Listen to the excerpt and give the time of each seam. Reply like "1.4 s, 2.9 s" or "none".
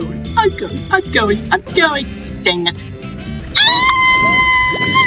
3.5 s